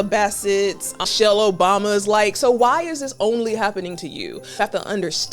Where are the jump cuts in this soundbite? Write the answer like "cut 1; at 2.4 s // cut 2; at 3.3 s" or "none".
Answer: cut 1; at 1.1 s // cut 2; at 4.5 s